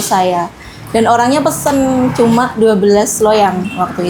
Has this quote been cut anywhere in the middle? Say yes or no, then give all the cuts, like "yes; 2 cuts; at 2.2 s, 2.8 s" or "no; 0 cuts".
no; 0 cuts